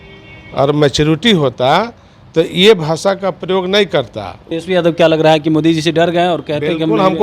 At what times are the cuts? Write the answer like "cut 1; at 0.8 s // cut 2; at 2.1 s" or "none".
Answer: cut 1; at 4.5 s